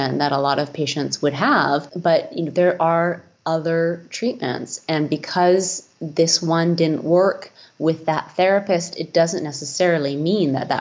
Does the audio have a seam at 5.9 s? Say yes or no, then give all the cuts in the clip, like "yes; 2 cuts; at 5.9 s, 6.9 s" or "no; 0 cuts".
no; 1 cut; at 1.9 s